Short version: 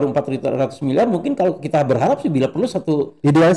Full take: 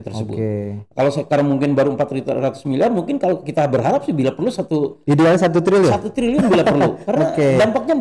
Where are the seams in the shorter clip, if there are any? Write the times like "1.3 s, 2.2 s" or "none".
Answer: none